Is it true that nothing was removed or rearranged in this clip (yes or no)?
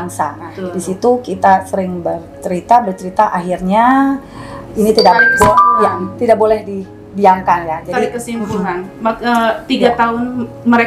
yes